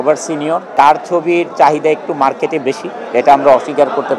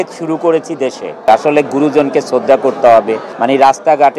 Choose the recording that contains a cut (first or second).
second